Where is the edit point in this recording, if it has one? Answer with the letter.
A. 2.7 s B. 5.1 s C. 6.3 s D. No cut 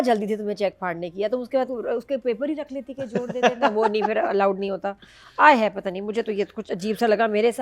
D